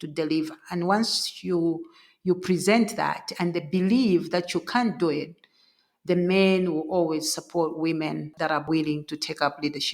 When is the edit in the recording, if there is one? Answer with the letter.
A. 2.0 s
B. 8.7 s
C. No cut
B